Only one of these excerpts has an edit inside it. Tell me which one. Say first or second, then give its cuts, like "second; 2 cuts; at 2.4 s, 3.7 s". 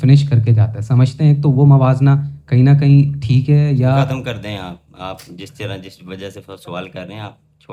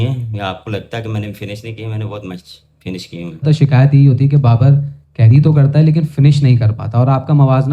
second; 1 cut; at 3.4 s